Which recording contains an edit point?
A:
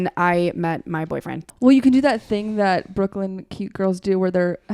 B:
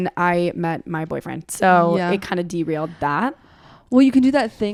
A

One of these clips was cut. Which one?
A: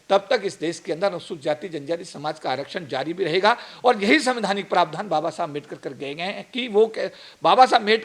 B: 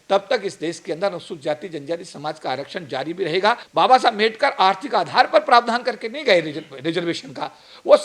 B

